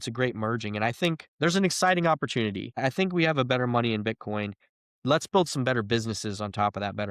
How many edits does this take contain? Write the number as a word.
two